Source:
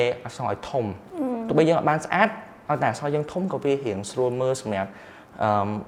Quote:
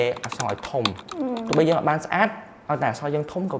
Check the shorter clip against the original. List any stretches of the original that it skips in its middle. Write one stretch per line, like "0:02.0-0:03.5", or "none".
none